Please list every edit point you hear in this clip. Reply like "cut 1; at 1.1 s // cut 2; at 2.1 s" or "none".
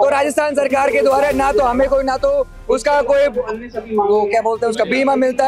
none